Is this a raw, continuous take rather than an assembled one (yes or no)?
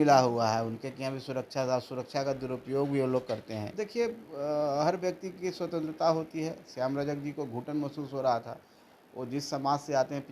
no